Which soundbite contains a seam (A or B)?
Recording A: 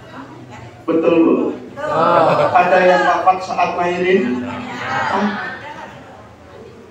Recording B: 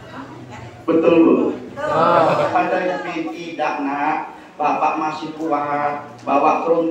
B